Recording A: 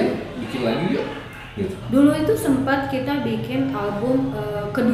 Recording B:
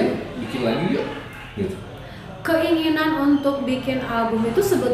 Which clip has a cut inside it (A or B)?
A